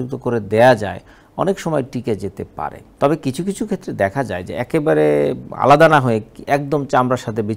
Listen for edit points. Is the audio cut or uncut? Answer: cut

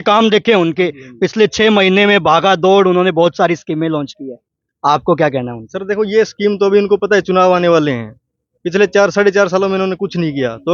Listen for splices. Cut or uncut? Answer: uncut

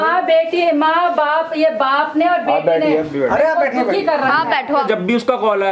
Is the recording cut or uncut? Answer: cut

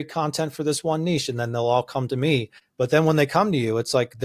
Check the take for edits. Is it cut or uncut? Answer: cut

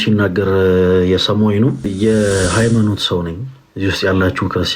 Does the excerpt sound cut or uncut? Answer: cut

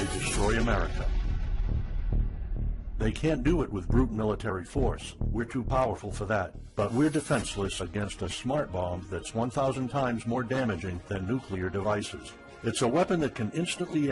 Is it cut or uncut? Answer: uncut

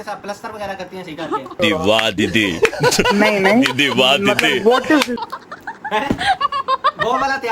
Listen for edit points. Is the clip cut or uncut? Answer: uncut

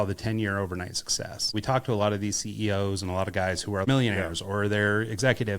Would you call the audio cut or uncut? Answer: cut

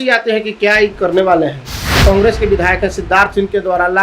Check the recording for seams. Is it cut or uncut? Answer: cut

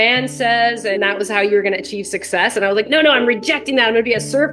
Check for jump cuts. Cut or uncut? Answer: cut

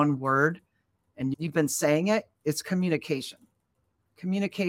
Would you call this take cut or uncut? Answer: uncut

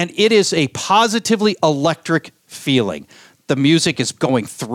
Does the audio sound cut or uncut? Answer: uncut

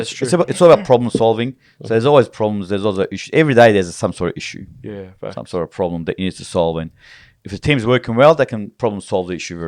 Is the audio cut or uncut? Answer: uncut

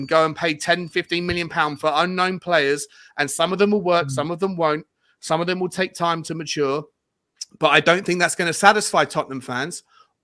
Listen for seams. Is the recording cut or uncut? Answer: uncut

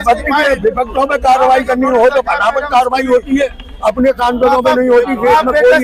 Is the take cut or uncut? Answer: uncut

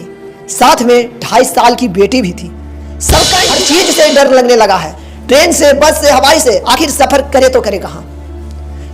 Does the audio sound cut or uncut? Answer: cut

